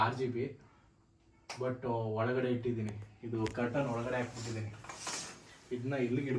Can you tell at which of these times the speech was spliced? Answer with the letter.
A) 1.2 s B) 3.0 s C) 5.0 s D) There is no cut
D